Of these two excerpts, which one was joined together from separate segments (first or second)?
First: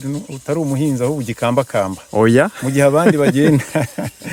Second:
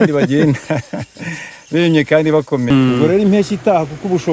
second